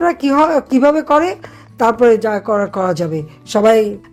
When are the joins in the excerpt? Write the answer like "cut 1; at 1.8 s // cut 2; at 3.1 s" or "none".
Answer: none